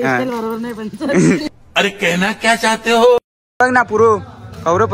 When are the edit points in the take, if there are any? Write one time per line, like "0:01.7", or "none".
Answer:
0:01.5
0:03.8